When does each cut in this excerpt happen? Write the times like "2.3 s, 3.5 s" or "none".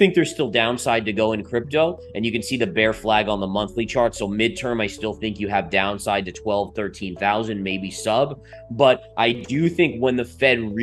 none